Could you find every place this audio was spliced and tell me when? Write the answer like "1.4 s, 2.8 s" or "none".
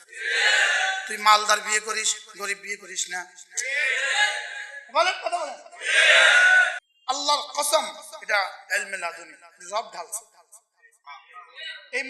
6.9 s